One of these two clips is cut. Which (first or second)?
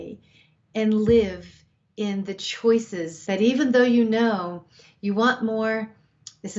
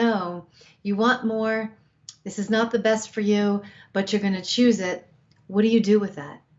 first